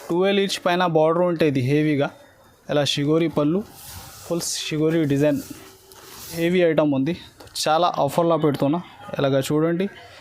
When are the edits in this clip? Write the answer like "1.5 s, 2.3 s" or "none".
6.4 s